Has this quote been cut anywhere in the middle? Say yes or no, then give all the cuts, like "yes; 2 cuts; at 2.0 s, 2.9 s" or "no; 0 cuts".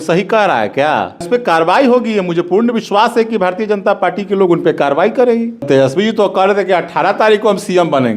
yes; 2 cuts; at 1.3 s, 5.7 s